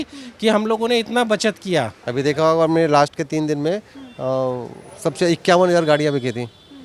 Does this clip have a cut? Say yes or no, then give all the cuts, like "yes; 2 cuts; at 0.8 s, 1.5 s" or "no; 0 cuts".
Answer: yes; 1 cut; at 2.0 s